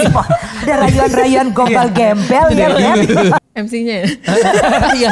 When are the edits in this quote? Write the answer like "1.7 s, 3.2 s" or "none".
3.4 s